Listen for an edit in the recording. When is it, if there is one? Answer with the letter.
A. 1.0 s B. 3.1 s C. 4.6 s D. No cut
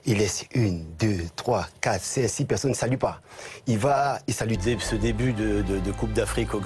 D